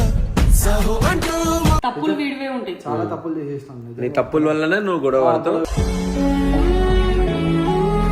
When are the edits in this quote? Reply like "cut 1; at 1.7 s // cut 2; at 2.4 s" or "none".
cut 1; at 1.8 s